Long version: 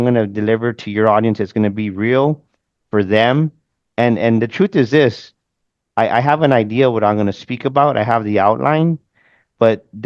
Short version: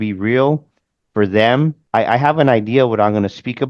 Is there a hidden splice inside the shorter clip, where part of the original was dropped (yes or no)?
yes